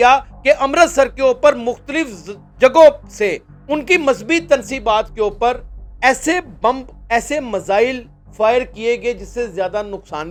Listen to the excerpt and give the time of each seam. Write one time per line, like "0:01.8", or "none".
none